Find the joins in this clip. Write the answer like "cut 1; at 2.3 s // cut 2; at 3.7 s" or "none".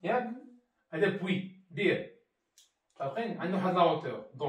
none